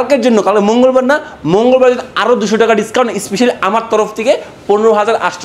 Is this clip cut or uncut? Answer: uncut